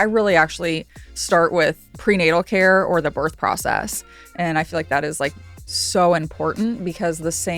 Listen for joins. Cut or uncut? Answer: cut